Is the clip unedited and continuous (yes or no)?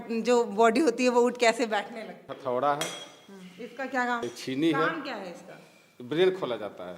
no